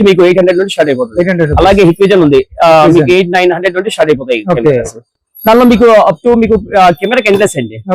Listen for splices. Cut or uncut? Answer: uncut